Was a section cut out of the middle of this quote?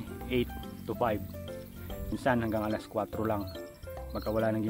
yes; 1 cut; at 2.1 s

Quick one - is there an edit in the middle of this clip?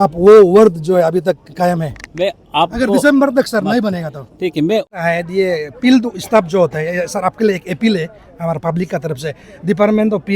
yes; 1 cut; at 4.9 s

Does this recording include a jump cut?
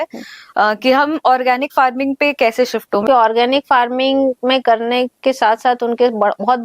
yes; 1 cut; at 3.0 s

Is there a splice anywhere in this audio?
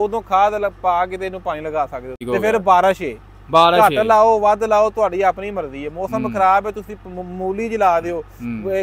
yes; 1 cut; at 2.2 s

